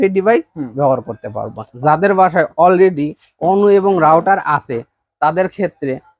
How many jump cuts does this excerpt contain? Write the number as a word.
one